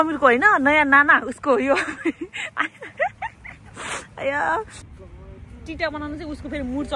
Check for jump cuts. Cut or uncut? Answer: cut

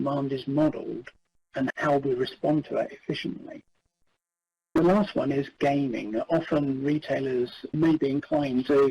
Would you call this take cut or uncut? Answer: cut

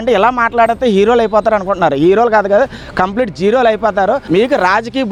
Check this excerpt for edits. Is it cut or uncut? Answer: uncut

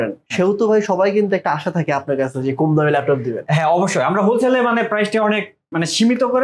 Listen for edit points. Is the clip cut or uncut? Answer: uncut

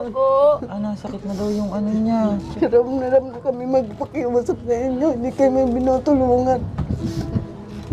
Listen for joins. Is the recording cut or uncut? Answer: cut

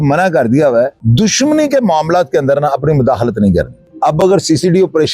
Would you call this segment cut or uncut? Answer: cut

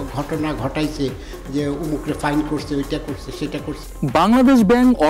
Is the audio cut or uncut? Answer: cut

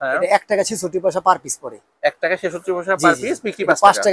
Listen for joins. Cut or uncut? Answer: uncut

